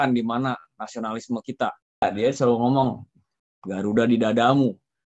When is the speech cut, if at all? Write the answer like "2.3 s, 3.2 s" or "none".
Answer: 2.0 s